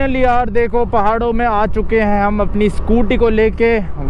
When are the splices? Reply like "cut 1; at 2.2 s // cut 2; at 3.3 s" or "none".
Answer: none